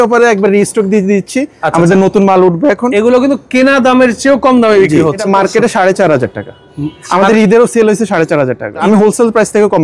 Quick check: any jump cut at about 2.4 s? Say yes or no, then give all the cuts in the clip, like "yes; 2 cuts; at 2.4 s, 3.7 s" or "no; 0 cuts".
no; 2 cuts; at 5.3 s, 8.8 s